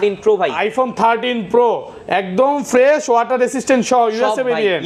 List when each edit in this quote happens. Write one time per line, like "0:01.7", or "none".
none